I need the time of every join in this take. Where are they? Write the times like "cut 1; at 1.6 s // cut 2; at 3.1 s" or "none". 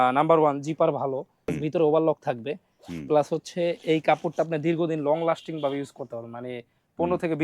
cut 1; at 1.5 s